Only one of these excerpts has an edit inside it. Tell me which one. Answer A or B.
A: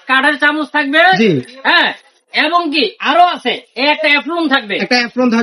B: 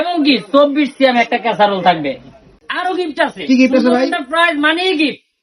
B